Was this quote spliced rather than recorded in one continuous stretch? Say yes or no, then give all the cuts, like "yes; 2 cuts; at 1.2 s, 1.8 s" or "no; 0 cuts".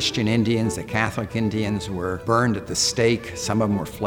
yes; 1 cut; at 2.2 s